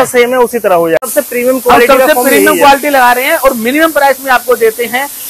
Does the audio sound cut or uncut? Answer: cut